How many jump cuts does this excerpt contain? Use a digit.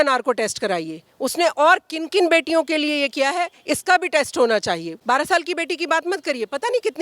1